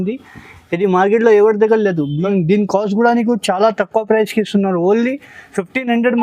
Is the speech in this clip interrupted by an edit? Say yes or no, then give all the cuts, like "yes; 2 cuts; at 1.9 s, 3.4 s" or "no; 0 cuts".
yes; 1 cut; at 2.3 s